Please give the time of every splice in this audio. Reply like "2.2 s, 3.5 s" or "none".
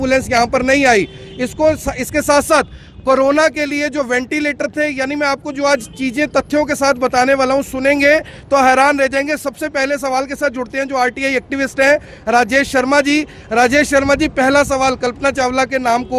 none